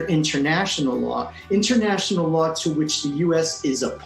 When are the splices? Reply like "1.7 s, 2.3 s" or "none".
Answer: none

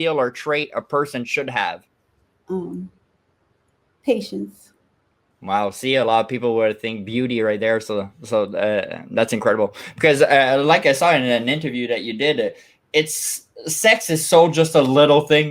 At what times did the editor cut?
none

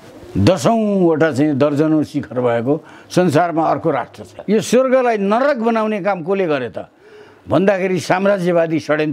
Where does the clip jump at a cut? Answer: 4.3 s

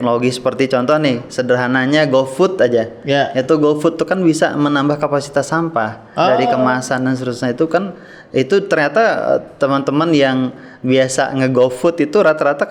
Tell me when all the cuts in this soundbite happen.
none

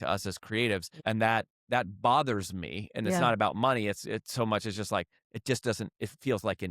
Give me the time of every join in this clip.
0.9 s, 1.6 s

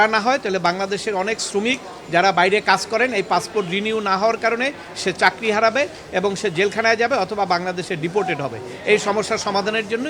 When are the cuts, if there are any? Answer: none

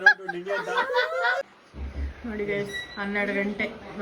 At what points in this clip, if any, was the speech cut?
1.5 s

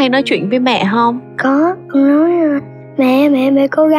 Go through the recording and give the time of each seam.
1.8 s

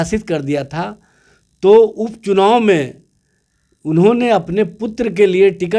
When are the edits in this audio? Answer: none

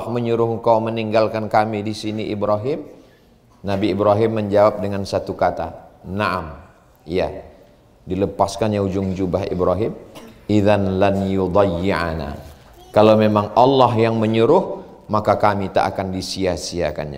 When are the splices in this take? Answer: none

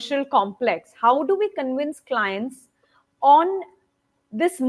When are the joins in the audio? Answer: none

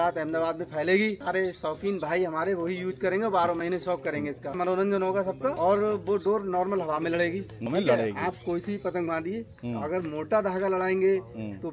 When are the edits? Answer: 1.2 s, 4.6 s, 5.6 s, 7.7 s

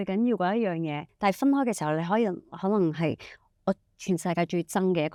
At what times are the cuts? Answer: none

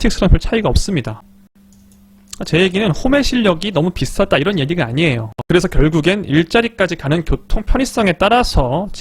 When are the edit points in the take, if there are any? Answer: 1.2 s, 5.3 s

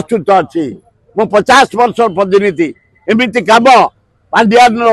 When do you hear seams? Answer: none

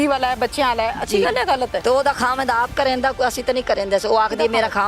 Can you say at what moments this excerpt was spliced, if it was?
1.8 s

